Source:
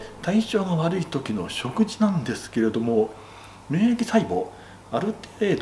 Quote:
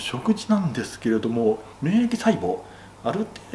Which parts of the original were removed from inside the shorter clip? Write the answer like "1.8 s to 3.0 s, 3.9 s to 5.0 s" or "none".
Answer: 3.2 s to 3.6 s